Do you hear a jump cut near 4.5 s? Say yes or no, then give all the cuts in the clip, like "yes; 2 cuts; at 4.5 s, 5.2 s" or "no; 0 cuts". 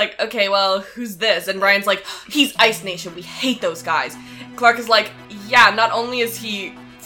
yes; 1 cut; at 4.5 s